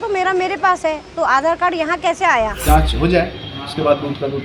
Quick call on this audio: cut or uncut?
cut